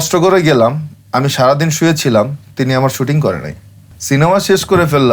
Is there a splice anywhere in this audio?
yes; 1 cut; at 4.0 s

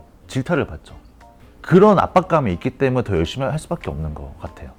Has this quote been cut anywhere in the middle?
no; 0 cuts

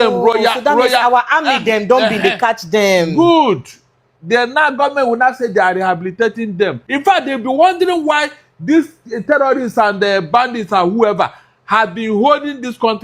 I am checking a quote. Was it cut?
yes; 1 cut; at 6.9 s

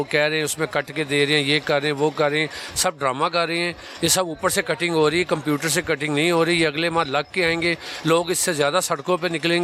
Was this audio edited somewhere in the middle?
no; 0 cuts

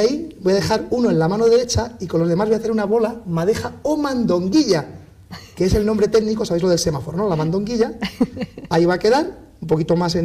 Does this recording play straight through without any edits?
no; 1 cut; at 9.2 s

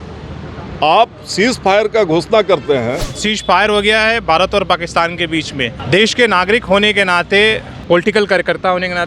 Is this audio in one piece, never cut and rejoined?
no; 3 cuts; at 3.1 s, 5.8 s, 7.7 s

